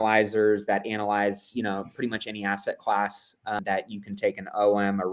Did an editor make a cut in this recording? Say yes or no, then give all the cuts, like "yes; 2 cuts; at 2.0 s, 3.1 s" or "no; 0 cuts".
yes; 1 cut; at 3.6 s